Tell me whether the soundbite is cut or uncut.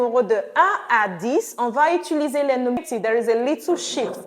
cut